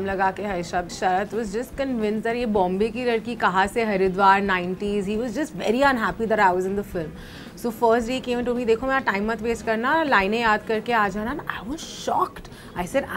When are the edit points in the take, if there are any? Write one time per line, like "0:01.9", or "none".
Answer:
0:00.9